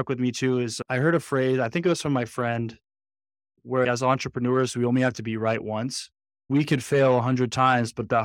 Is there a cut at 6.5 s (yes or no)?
yes